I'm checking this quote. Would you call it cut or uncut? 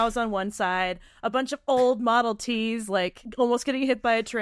cut